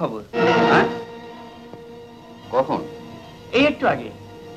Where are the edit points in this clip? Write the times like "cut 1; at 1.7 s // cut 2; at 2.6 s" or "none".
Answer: none